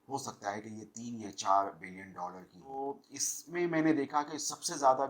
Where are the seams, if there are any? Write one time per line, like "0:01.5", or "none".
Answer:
0:02.8

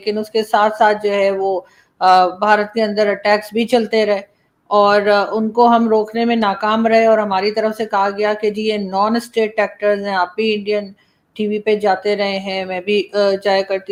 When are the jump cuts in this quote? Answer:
none

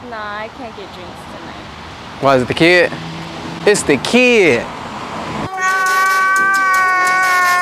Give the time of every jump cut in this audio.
none

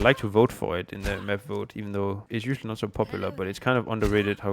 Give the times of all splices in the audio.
0:02.3

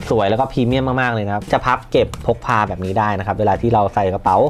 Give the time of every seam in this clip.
0:01.5

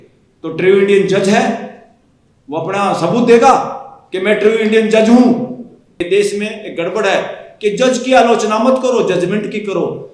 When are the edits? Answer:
0:06.0

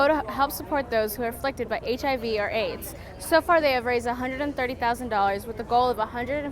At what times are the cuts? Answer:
none

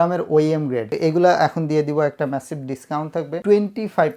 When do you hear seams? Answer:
0:00.9
0:03.4

